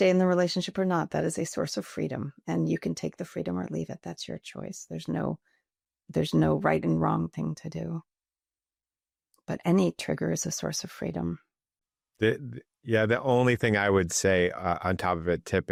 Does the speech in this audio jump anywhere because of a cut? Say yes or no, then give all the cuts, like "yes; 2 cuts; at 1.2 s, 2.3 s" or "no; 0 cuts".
no; 0 cuts